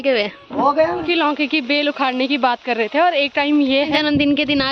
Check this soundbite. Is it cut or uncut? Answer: cut